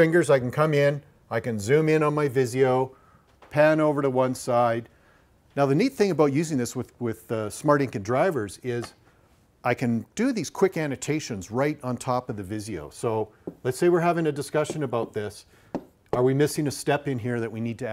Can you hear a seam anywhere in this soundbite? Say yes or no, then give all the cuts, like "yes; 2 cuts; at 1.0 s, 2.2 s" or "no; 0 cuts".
yes; 1 cut; at 4.2 s